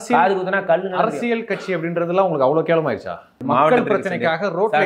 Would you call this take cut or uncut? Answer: cut